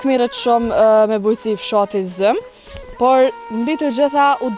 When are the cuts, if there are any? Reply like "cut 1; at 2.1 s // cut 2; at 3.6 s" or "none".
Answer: none